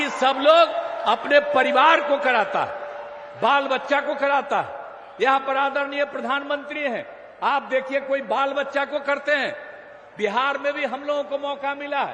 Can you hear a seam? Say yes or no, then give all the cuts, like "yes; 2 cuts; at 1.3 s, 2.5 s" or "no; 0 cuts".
no; 0 cuts